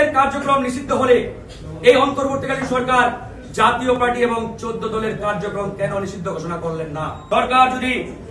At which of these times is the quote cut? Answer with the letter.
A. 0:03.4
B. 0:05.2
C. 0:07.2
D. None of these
C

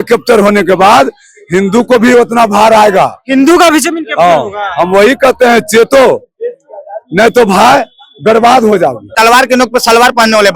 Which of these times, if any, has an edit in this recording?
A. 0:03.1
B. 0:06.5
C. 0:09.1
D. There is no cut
C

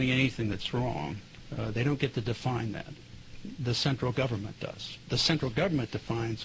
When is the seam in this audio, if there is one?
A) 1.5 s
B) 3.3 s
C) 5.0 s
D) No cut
C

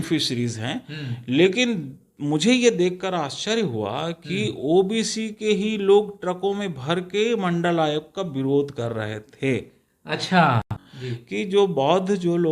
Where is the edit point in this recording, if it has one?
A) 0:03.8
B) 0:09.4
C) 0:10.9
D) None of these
C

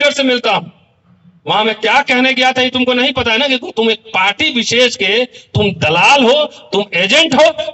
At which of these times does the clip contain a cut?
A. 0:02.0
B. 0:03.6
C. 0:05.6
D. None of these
D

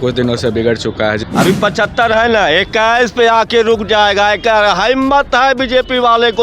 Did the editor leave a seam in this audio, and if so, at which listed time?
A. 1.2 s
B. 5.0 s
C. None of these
A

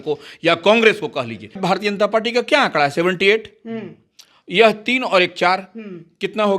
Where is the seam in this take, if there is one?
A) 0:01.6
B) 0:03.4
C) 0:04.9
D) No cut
A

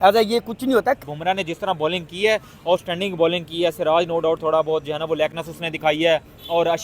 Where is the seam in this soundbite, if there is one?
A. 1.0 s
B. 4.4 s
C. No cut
A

